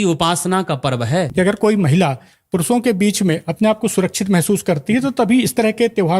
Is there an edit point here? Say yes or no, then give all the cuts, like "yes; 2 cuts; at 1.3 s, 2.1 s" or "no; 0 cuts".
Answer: yes; 1 cut; at 1.3 s